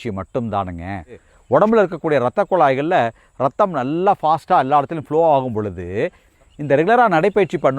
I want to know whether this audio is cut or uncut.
cut